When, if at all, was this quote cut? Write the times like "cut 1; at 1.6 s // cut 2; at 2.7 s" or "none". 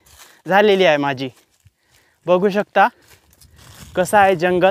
none